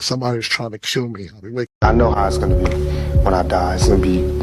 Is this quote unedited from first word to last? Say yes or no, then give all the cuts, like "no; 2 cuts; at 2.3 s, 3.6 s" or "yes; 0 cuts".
no; 1 cut; at 1.7 s